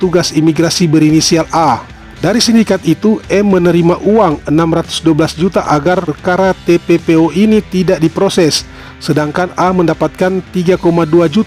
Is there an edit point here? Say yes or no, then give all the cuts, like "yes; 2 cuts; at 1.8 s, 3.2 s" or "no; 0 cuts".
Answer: no; 0 cuts